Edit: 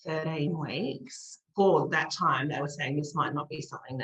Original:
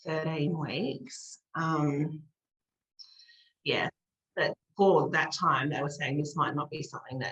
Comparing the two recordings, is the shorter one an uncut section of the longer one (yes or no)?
no